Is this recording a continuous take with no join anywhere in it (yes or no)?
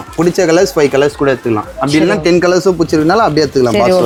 yes